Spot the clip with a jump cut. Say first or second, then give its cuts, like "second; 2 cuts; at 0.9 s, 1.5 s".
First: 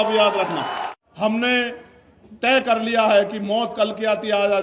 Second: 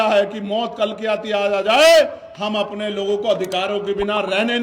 first; 1 cut; at 0.9 s